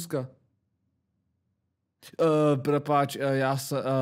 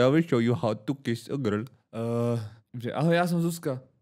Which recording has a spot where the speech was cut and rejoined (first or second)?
second